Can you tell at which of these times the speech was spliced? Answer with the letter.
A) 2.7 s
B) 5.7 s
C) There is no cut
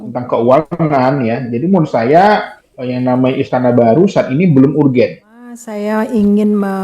B